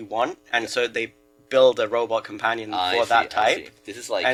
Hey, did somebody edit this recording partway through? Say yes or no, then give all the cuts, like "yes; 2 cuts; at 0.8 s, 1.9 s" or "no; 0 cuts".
no; 0 cuts